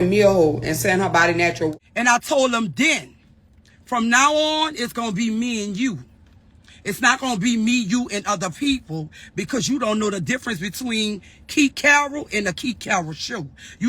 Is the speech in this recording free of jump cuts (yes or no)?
no